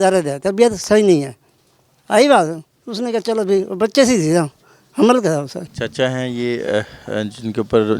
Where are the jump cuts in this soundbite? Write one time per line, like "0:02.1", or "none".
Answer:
none